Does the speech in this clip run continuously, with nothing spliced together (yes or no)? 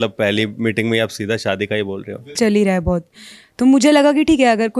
no